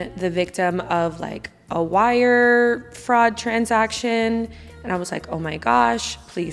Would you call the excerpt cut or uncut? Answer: uncut